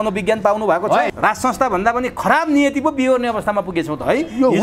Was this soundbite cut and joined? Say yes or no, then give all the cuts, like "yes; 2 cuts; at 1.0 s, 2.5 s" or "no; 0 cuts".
yes; 1 cut; at 1.1 s